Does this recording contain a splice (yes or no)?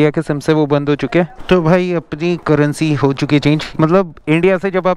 yes